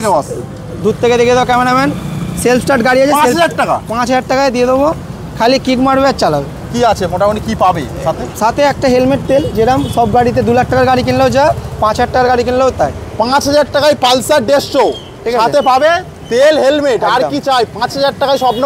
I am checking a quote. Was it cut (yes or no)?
no